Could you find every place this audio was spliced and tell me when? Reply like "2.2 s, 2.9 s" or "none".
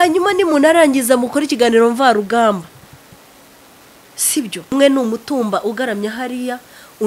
4.7 s